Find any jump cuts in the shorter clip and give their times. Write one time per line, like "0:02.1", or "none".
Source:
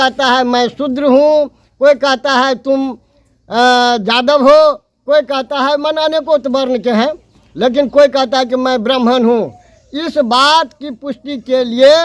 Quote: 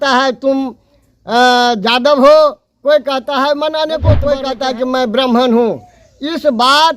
0:04.4

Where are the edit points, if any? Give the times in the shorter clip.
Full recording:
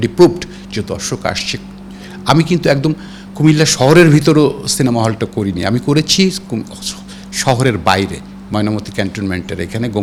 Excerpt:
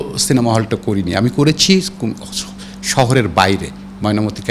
none

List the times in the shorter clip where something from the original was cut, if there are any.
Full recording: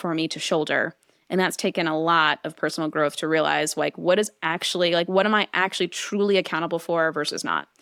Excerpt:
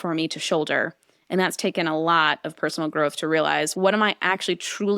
0:03.7

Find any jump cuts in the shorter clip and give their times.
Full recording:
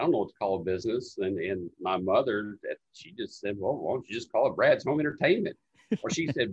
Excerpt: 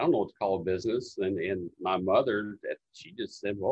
none

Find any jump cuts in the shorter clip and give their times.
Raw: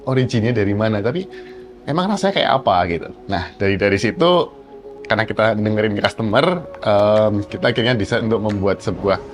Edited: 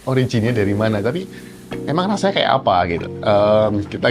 0:03.1

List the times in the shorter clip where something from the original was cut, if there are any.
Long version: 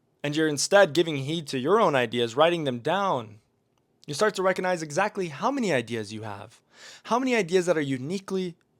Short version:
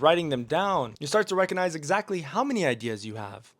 0:01.0

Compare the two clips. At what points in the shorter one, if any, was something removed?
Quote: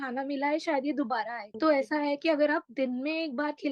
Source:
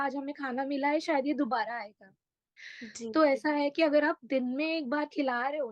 0:01.4

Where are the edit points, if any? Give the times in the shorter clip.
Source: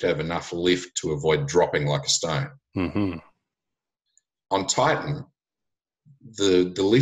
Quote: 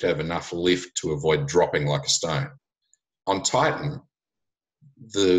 0:02.6

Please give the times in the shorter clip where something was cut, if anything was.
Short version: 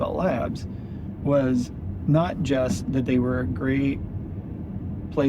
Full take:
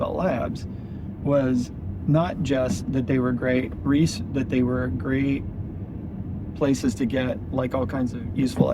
0:03.0

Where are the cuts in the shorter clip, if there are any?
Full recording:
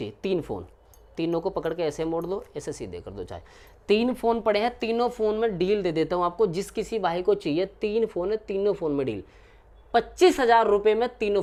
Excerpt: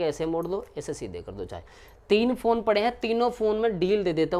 none

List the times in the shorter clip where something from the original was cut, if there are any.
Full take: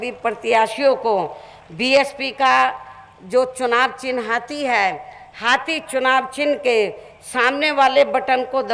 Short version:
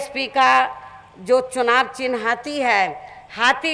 none

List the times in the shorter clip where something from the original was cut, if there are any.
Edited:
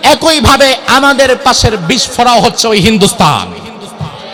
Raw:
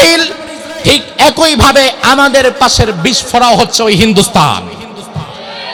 none

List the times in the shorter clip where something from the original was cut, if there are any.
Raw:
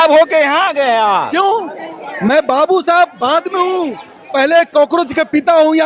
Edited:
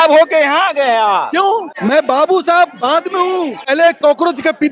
0:01.7
0:03.7

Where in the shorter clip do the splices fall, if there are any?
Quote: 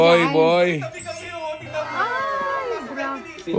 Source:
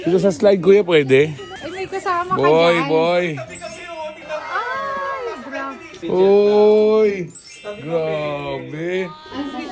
none

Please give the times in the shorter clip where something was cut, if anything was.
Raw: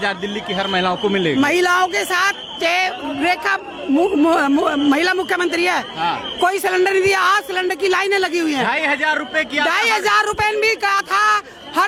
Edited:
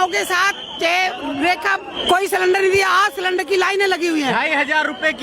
0:01.9

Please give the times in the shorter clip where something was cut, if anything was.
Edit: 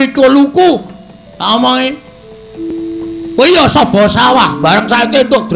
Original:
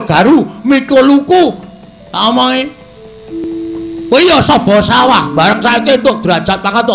none

